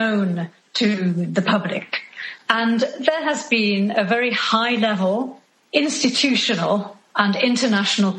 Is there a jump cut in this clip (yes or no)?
yes